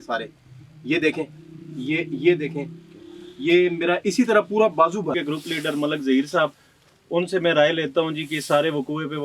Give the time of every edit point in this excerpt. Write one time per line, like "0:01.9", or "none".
0:05.1